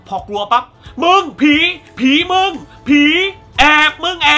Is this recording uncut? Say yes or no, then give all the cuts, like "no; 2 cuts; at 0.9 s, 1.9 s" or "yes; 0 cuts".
yes; 0 cuts